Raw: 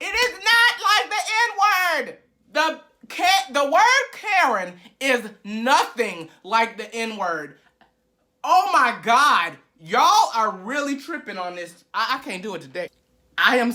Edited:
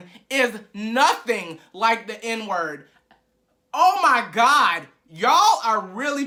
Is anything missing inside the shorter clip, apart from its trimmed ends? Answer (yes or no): no